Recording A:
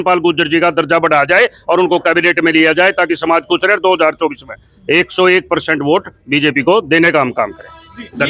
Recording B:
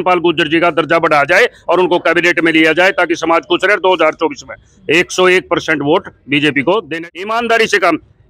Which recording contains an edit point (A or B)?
B